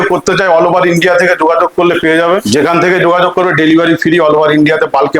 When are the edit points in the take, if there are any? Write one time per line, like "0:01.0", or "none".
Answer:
0:02.4